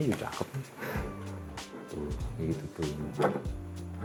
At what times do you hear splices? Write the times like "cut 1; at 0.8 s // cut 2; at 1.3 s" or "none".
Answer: none